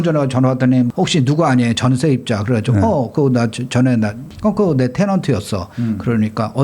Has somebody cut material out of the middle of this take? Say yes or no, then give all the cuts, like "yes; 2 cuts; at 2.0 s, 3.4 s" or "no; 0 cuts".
yes; 2 cuts; at 0.9 s, 4.3 s